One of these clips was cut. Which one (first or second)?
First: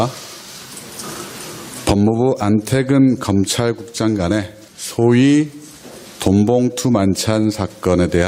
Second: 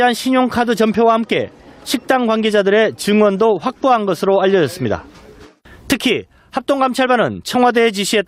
first